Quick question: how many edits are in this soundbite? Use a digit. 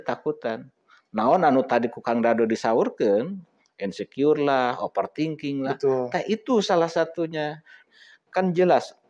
1